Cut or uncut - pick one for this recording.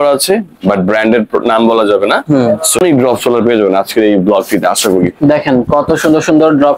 cut